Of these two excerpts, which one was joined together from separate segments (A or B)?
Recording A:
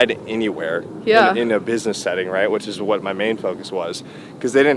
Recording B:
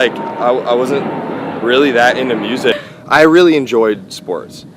B